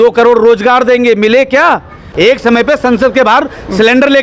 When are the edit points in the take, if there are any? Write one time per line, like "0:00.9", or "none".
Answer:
0:02.0